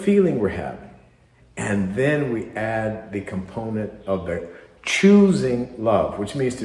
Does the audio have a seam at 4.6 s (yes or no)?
no